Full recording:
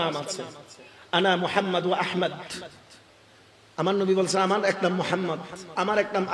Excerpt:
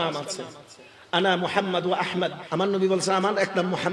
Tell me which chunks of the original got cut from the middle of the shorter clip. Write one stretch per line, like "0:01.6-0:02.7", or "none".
0:02.4-0:03.7

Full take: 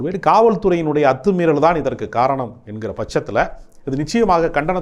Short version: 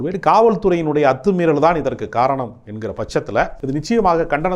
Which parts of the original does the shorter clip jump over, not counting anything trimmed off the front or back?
0:03.6-0:03.8

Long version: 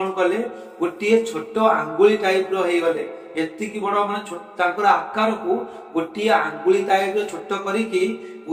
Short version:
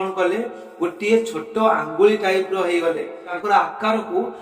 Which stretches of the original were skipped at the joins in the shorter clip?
0:03.3-0:04.6

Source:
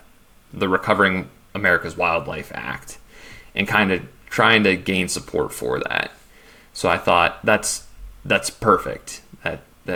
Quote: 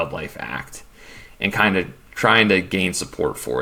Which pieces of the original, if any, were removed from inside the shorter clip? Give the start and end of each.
none

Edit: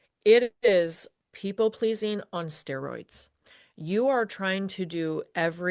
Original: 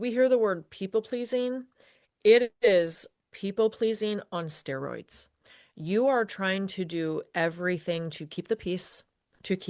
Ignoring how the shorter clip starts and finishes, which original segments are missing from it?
none

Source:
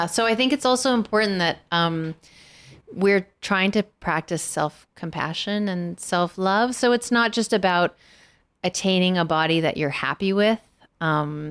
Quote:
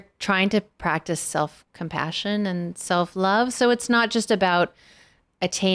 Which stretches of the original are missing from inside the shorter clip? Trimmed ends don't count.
none

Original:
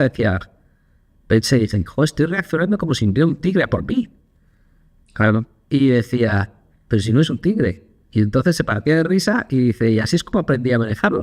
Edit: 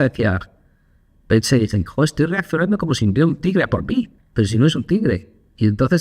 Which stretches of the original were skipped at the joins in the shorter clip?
0:04.2-0:06.7

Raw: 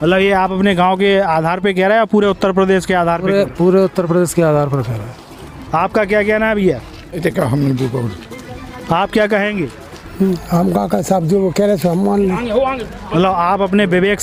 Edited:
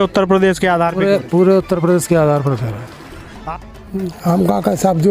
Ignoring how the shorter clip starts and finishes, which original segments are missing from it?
0:05.7-0:09.7

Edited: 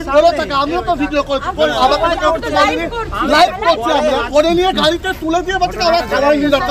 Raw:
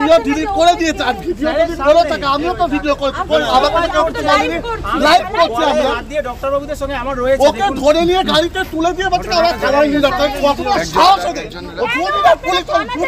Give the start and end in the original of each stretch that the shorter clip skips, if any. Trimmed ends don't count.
0:06.0-0:07.8

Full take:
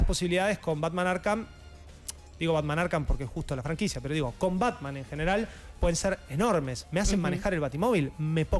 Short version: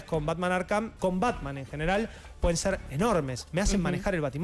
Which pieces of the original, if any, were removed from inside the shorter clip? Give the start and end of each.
0:01.5-0:04.3

